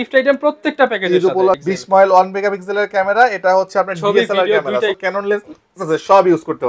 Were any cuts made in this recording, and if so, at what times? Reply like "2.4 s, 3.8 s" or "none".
1.6 s, 4.9 s